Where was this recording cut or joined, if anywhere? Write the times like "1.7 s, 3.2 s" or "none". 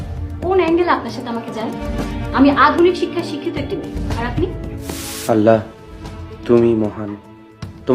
5.1 s

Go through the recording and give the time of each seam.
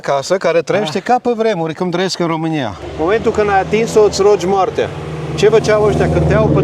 2.9 s

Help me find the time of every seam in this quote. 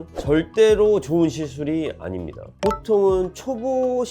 2.6 s

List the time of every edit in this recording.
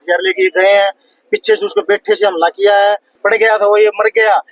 3.1 s

